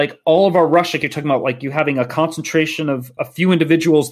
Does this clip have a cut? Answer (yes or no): no